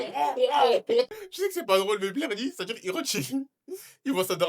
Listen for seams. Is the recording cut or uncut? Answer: cut